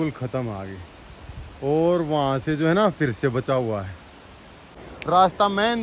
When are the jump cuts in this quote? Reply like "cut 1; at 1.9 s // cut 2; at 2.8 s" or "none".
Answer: cut 1; at 4.9 s